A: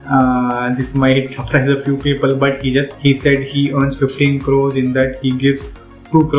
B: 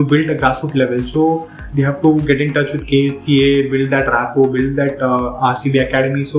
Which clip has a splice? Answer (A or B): A